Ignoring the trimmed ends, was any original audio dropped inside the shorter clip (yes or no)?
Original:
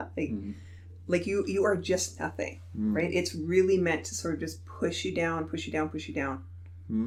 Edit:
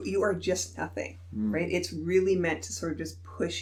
no